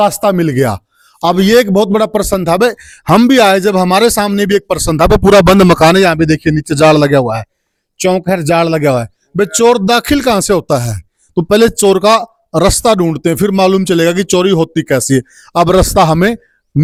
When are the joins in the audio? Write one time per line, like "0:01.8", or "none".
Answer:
none